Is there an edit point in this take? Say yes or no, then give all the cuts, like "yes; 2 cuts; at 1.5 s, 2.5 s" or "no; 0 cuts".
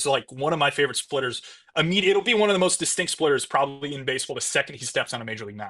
no; 0 cuts